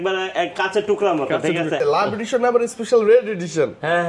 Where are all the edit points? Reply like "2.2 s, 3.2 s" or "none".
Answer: 1.8 s